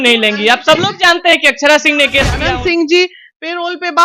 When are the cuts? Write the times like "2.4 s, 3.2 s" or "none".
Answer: 2.4 s